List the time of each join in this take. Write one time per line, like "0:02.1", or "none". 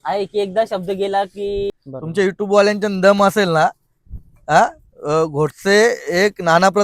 0:01.7